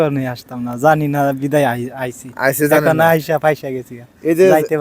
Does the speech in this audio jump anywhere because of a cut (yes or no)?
no